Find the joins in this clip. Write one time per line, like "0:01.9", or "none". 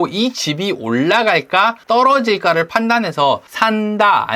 0:01.8
0:03.5